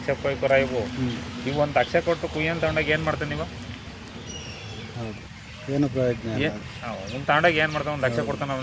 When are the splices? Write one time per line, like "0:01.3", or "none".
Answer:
none